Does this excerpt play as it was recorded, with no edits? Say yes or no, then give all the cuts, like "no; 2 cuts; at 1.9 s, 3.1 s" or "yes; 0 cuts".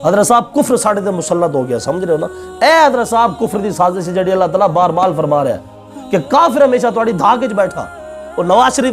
no; 1 cut; at 2.4 s